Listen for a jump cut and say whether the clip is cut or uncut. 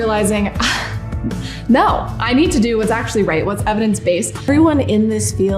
cut